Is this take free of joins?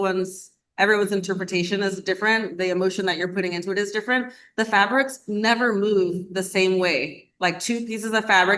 yes; 0 cuts

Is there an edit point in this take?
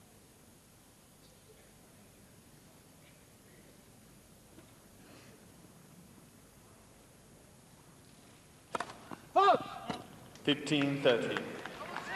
yes; 1 cut; at 4.4 s

